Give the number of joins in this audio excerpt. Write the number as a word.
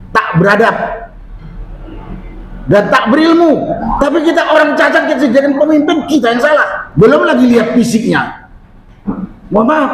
two